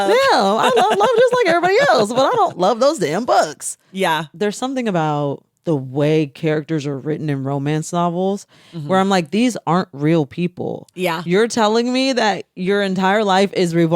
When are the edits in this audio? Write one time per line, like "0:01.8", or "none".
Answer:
0:04.1
0:05.5